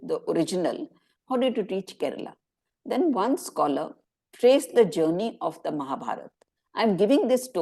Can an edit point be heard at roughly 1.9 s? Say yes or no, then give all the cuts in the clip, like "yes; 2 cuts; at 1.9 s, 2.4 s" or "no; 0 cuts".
no; 0 cuts